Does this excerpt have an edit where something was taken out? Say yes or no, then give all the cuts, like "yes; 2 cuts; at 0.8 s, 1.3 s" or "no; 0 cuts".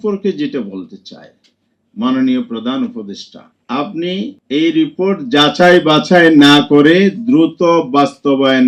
no; 0 cuts